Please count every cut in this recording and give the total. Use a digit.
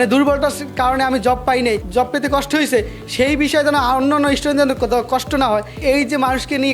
1